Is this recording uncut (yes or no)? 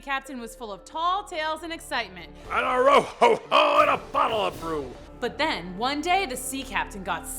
no